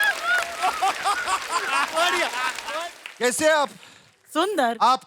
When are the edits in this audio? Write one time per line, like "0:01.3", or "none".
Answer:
0:02.6